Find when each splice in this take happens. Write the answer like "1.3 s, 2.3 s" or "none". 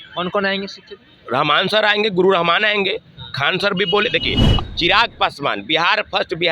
4.5 s